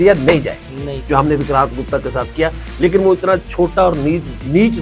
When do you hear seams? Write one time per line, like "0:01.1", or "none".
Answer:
0:01.0